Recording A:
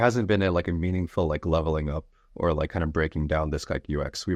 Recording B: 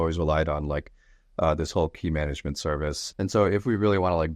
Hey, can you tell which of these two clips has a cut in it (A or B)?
B